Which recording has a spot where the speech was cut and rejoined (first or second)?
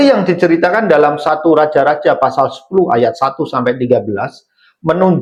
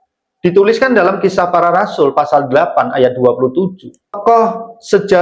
second